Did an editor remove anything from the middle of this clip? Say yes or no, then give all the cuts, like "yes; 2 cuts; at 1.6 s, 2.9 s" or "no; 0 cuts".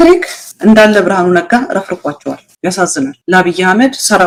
no; 0 cuts